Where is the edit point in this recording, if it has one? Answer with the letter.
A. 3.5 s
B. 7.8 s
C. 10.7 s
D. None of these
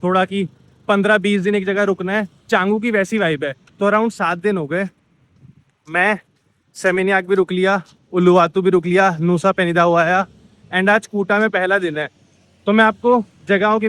A